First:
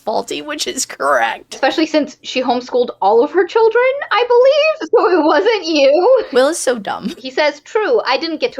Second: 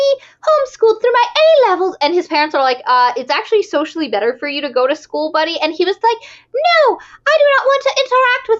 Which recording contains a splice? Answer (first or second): first